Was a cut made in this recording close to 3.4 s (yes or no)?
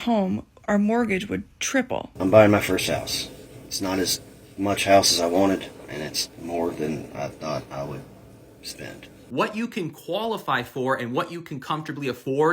no